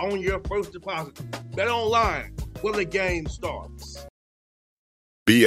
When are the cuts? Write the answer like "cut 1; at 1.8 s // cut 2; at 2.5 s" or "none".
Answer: cut 1; at 4.0 s